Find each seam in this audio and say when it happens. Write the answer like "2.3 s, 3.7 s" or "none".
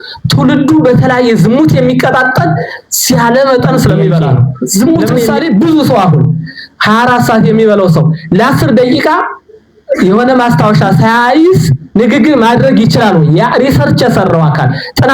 5.4 s